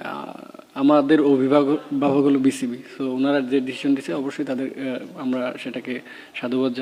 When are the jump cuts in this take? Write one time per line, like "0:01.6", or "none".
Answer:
none